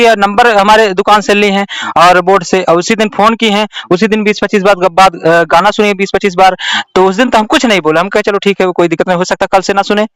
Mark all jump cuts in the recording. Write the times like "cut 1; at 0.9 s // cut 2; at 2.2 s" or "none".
none